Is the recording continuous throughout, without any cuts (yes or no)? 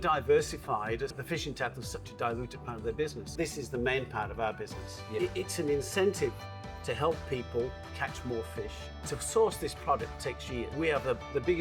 no